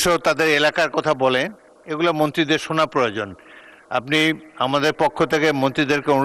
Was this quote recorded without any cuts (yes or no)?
yes